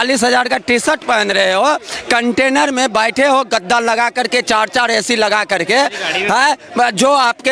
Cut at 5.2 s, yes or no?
no